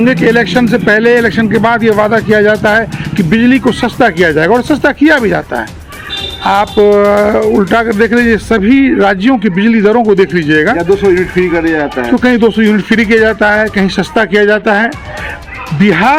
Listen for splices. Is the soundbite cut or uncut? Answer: uncut